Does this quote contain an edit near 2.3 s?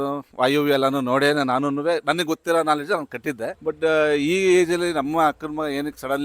no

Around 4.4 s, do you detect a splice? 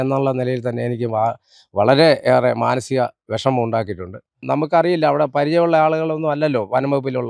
yes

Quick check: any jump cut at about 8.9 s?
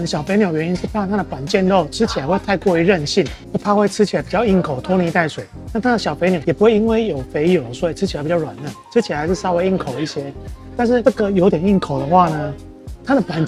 no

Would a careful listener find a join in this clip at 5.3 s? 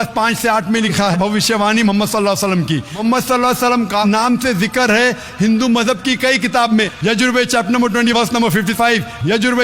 no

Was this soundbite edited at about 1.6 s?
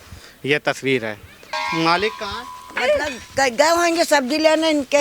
yes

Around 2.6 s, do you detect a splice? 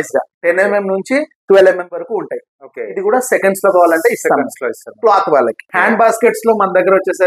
no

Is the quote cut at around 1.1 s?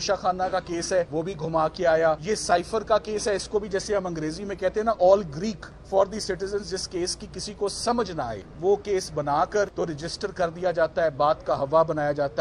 yes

